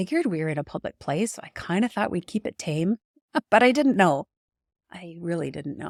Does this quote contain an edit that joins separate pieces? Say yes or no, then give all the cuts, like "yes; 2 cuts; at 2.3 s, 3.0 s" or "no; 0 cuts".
no; 0 cuts